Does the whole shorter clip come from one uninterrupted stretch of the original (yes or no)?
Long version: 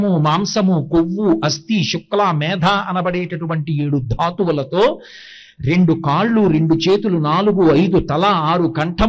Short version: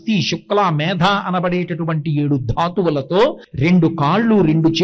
no